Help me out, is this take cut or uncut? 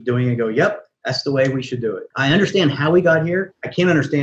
cut